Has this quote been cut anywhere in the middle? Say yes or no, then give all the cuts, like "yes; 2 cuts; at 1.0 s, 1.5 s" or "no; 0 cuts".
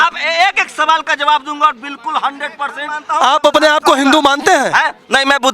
yes; 1 cut; at 3.0 s